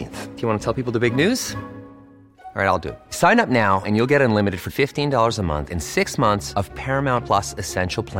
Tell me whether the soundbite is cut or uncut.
uncut